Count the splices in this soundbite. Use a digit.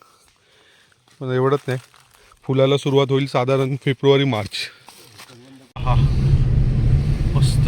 1